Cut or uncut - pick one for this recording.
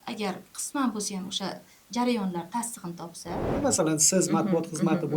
cut